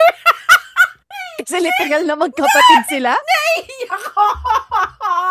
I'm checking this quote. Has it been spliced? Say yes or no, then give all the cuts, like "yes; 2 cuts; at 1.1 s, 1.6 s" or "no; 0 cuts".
no; 0 cuts